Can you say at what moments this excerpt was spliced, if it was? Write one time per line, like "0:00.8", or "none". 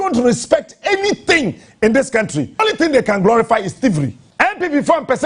0:02.6
0:04.2